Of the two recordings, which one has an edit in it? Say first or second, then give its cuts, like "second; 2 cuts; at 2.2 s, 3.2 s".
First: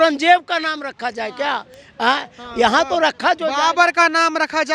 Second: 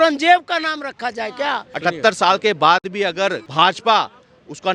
second; 2 cuts; at 1.7 s, 3.4 s